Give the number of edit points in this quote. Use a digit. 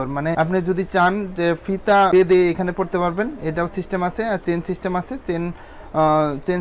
0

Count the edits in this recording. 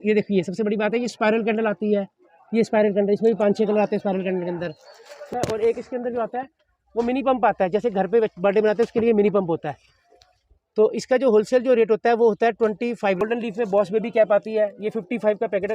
2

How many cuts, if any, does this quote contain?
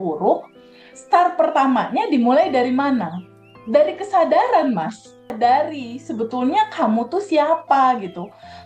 1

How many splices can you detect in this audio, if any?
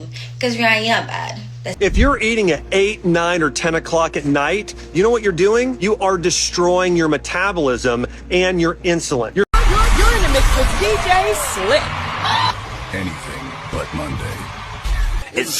2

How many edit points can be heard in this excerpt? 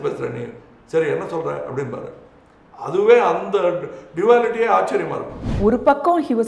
1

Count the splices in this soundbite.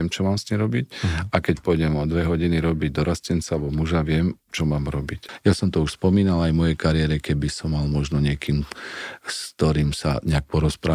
1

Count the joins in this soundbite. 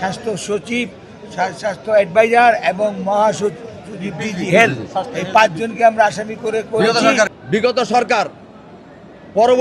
1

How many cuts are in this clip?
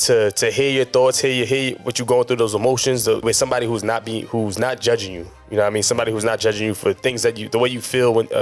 1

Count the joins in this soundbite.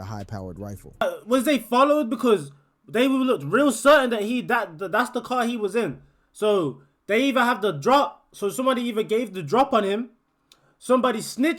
1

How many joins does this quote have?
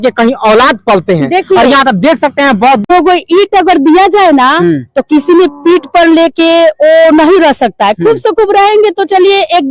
1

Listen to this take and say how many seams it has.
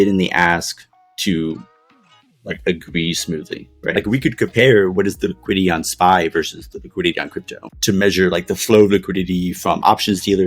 2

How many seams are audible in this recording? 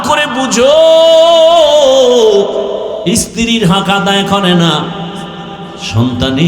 1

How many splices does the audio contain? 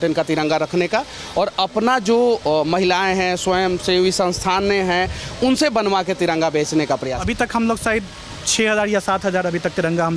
1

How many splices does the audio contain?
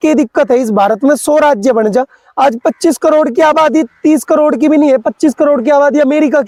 0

